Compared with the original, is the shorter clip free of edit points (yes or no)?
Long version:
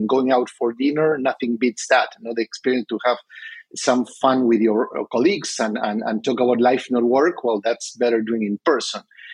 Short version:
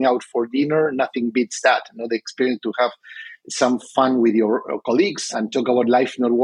no